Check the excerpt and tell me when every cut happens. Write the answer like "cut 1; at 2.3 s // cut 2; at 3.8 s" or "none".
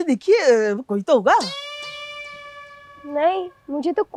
none

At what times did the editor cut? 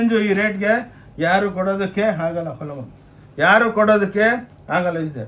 none

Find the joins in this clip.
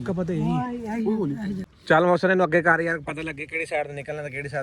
cut 1; at 1.7 s

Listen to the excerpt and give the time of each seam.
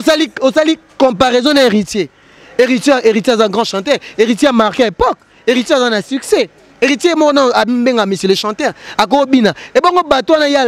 none

